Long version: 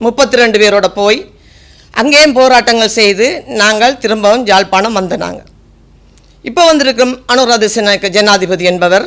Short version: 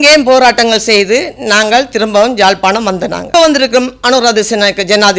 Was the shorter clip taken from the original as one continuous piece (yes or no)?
no